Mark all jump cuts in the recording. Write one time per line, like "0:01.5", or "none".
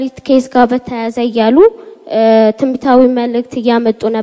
none